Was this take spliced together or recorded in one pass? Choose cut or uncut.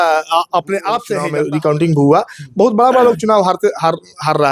cut